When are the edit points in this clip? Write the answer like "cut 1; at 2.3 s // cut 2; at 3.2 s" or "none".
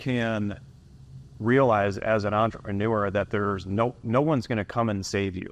none